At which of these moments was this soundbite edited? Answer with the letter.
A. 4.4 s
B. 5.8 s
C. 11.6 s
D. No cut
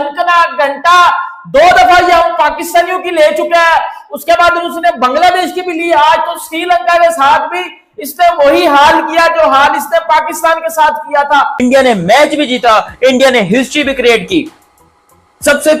C